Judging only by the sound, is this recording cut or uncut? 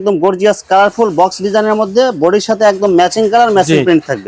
uncut